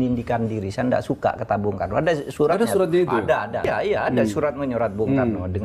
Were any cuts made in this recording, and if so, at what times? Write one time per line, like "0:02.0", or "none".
0:03.7

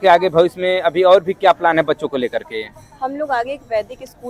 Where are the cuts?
none

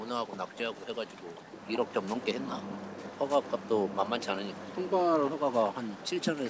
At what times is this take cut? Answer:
0:01.5
0:03.1

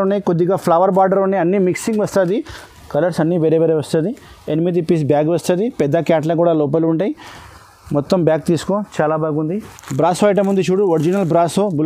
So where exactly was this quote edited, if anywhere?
0:02.6
0:09.8

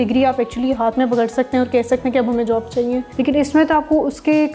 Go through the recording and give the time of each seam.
0:03.1

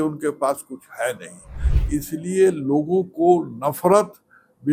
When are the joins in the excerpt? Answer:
none

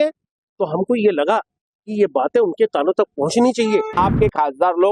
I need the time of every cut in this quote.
0:03.9

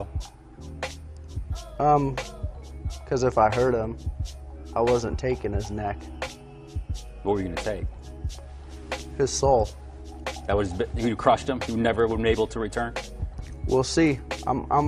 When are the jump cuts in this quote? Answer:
0:11.8

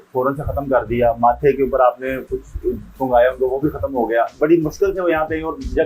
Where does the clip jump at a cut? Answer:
0:04.4

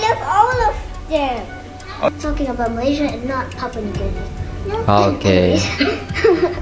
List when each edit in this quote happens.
0:02.2

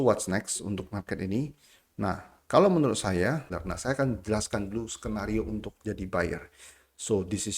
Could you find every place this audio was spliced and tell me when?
0:03.6

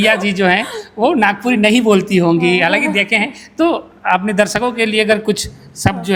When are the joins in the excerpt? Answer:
none

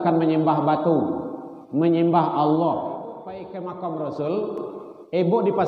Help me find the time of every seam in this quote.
0:03.5

